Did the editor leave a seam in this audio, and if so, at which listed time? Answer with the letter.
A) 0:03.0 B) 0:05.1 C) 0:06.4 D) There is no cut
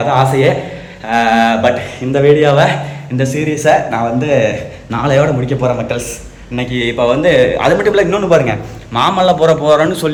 D